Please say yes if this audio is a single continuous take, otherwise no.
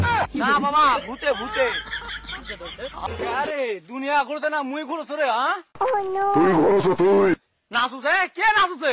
no